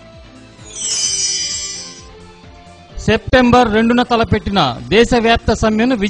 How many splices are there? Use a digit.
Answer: 1